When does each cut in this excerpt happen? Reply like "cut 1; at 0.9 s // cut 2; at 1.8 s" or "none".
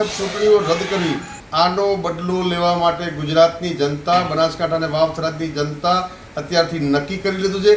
cut 1; at 1.4 s